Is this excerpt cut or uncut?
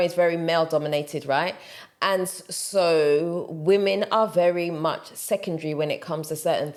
uncut